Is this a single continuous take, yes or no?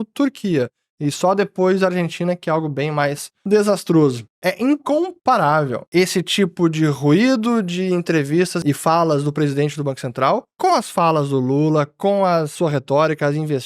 no